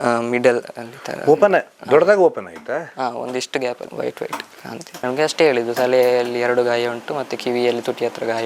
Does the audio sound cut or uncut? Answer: cut